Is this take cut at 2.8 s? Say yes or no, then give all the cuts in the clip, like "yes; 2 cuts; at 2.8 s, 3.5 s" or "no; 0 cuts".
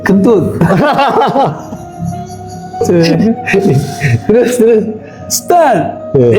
yes; 1 cut; at 2.8 s